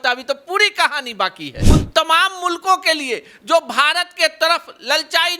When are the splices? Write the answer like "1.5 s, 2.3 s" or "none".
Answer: 1.5 s